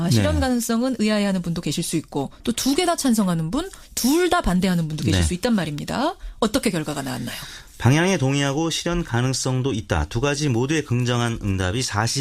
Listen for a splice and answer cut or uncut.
cut